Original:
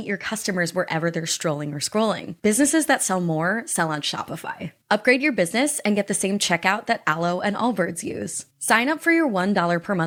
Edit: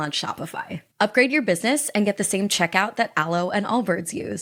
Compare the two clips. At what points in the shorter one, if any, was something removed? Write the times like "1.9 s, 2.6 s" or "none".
none